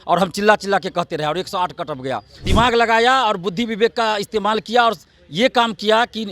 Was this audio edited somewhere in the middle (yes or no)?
yes